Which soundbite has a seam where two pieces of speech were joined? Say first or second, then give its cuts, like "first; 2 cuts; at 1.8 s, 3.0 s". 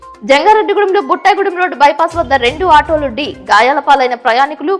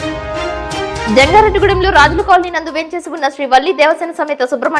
second; 1 cut; at 1.0 s